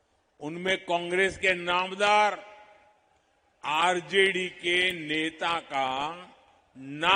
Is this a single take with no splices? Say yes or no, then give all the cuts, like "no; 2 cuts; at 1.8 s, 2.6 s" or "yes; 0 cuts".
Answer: yes; 0 cuts